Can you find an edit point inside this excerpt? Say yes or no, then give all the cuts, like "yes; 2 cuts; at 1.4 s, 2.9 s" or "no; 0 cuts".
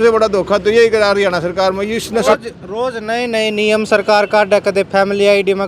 yes; 1 cut; at 2.2 s